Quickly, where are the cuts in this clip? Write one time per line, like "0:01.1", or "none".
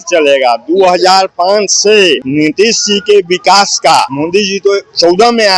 0:02.2
0:04.1